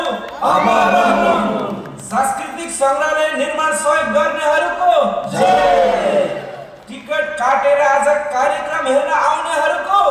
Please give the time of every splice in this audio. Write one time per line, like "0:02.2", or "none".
none